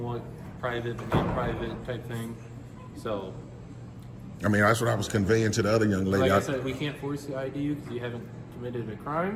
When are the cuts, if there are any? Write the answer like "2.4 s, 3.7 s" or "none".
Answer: none